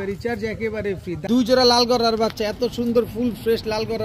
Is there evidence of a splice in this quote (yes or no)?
yes